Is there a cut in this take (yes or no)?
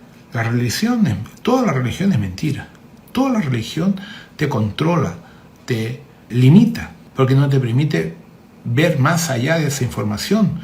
yes